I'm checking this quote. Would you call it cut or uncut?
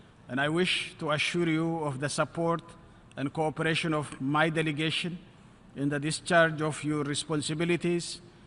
uncut